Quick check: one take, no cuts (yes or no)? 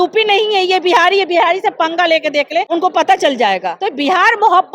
no